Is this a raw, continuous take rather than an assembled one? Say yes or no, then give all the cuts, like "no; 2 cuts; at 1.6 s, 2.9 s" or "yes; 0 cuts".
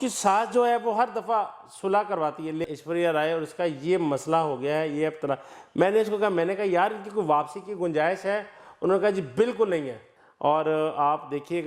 no; 2 cuts; at 2.7 s, 10.0 s